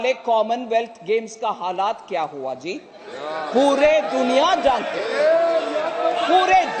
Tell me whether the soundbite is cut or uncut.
uncut